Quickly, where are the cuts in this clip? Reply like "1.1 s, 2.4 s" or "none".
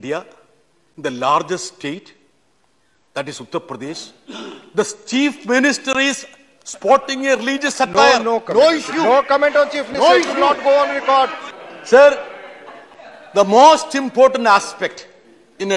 11.4 s